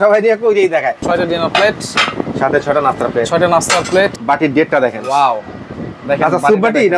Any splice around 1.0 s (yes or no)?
yes